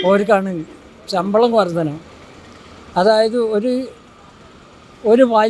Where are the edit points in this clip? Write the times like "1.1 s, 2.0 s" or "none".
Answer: none